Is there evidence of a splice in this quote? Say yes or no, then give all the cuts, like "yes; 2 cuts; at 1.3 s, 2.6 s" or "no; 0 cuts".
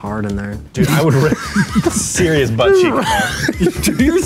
no; 0 cuts